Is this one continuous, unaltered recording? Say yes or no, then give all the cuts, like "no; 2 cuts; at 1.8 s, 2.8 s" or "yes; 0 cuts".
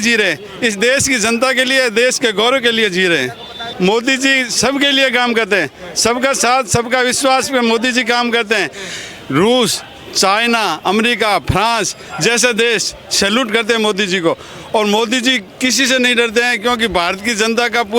no; 2 cuts; at 3.6 s, 8.8 s